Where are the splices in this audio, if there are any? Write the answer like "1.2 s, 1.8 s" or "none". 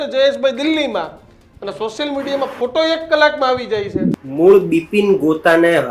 4.2 s